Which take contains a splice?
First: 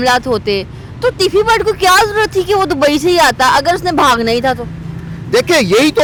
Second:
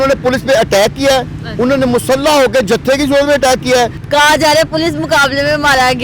second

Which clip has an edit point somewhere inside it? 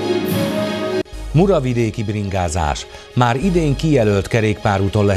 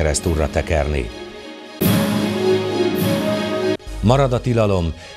first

